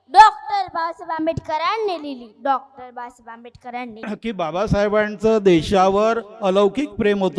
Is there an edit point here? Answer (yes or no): yes